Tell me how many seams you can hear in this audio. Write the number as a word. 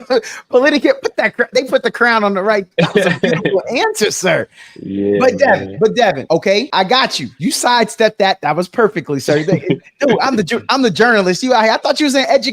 one